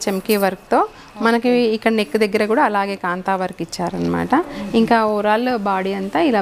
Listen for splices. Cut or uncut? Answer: uncut